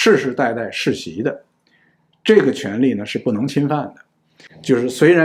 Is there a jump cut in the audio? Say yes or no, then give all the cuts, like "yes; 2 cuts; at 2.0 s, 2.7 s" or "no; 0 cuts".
no; 0 cuts